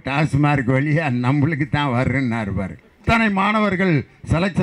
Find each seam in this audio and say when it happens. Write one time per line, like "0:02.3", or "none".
0:03.0